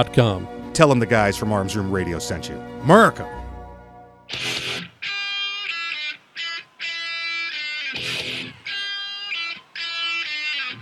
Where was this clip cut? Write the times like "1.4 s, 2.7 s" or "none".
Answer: 4.2 s

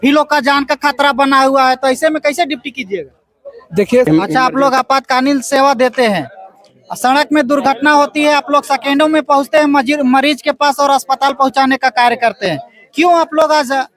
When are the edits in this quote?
4.1 s

